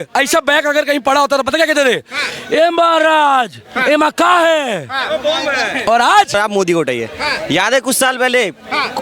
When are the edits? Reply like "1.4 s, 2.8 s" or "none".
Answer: 6.4 s